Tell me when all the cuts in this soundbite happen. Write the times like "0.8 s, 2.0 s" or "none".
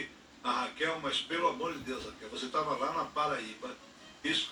none